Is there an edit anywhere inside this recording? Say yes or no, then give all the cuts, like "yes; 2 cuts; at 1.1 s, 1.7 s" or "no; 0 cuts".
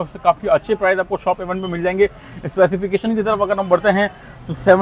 no; 0 cuts